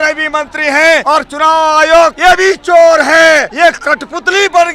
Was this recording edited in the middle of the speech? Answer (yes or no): yes